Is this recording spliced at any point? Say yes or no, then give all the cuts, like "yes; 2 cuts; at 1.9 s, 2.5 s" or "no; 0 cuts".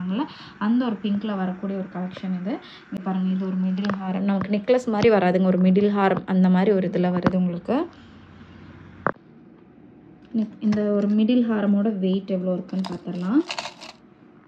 no; 0 cuts